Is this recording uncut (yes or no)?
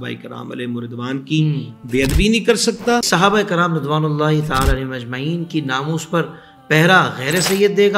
no